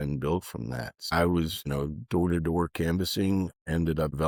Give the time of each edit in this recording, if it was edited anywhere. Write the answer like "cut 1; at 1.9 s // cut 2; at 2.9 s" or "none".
none